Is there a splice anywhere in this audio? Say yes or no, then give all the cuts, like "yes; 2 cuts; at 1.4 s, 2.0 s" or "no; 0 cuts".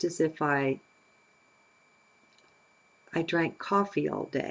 no; 0 cuts